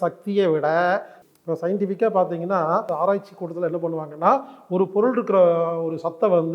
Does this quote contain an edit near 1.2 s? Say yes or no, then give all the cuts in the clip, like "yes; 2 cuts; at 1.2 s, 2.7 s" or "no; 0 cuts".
yes; 2 cuts; at 1.2 s, 2.9 s